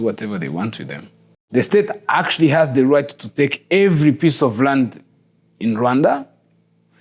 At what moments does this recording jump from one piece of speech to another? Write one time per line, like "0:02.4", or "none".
0:01.5